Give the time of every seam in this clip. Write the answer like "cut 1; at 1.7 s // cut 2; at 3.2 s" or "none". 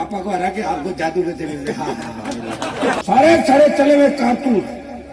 cut 1; at 3.0 s